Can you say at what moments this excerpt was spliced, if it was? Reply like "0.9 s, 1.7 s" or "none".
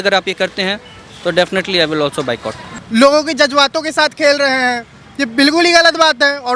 2.6 s